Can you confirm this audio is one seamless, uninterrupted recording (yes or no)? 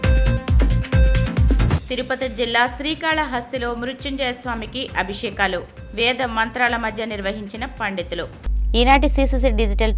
yes